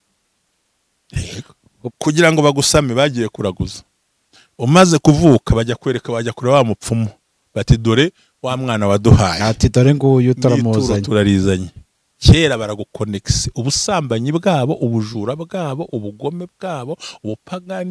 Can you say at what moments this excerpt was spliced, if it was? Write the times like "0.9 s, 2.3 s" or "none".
1.9 s